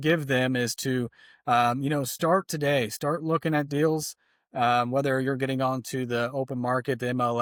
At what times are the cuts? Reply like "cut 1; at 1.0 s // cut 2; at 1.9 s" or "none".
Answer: none

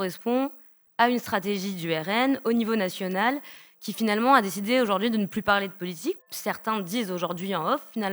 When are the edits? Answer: cut 1; at 6.3 s

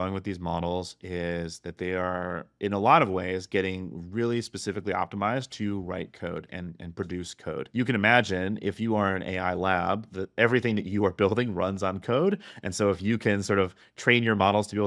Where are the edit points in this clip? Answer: cut 1; at 7.6 s

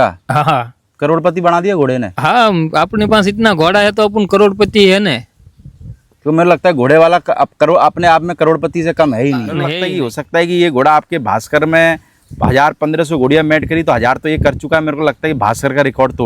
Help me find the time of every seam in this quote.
cut 1; at 9.7 s

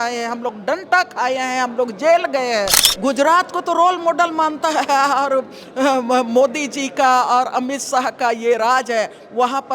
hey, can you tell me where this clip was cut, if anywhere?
cut 1; at 2.8 s

